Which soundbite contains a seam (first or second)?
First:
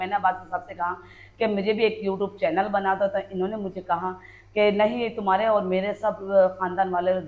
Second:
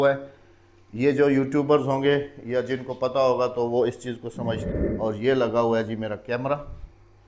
second